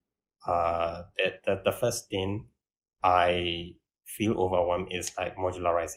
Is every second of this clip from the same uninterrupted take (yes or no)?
yes